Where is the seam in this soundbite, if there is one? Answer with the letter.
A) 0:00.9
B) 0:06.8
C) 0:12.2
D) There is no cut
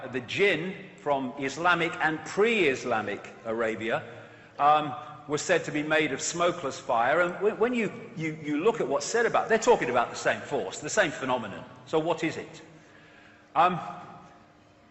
C